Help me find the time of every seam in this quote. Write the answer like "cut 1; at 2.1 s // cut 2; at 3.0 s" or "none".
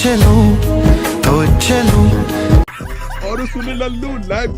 cut 1; at 2.6 s